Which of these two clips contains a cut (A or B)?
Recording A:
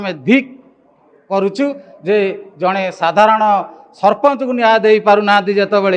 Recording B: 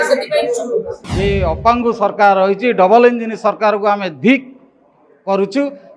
B